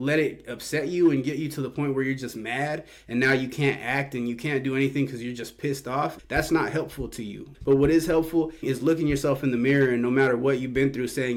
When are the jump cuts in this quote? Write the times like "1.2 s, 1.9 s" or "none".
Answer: none